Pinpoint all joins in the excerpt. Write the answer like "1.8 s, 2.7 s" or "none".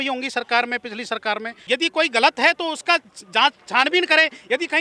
1.6 s